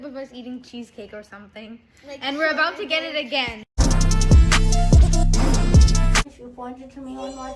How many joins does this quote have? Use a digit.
2